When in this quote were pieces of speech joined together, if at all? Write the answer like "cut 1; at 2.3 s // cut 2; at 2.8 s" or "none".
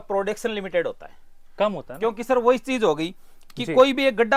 none

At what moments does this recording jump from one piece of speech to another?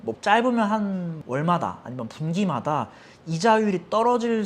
none

